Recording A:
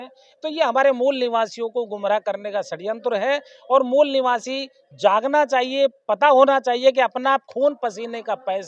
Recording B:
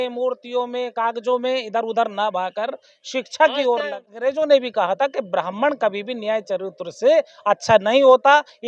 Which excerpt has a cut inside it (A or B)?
B